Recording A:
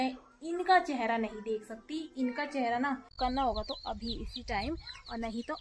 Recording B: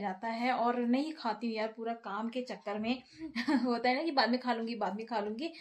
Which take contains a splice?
A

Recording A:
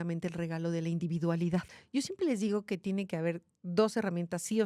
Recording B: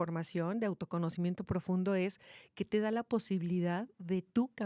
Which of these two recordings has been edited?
A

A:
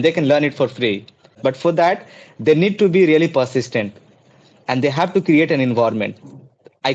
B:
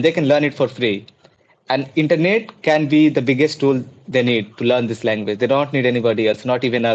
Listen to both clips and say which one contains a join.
A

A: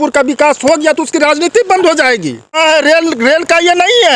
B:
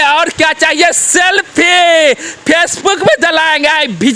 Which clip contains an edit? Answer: A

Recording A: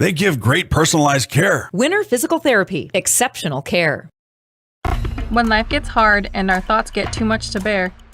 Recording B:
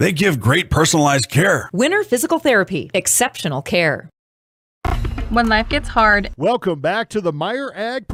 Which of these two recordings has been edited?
A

